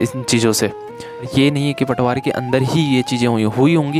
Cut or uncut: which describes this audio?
cut